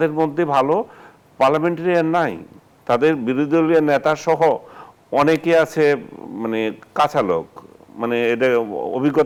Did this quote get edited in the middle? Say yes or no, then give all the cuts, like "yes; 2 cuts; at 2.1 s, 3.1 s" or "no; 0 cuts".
no; 0 cuts